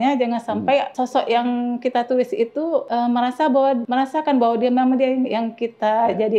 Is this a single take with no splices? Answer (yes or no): no